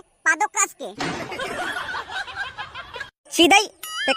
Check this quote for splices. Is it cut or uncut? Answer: uncut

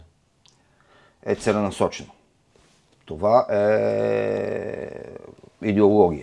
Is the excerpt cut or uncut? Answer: uncut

